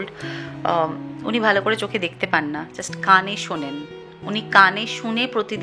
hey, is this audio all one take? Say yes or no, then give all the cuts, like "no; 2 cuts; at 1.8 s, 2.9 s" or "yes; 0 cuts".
yes; 0 cuts